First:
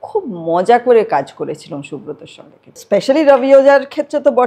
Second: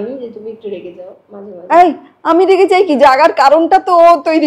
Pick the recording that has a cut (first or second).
first